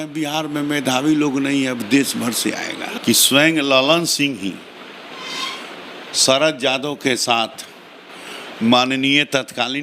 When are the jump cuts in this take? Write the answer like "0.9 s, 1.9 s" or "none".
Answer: 2.9 s